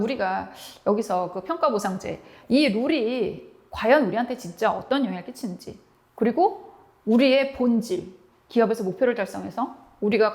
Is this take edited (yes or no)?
yes